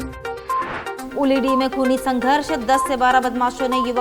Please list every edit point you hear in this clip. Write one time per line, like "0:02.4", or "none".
0:00.9